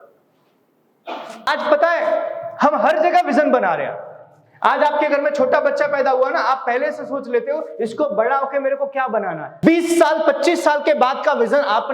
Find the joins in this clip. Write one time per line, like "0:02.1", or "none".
0:01.5
0:09.6